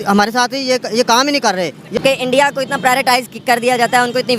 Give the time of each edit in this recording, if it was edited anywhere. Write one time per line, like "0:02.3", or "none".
0:02.0